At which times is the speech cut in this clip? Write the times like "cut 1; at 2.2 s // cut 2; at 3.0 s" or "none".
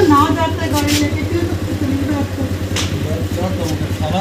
none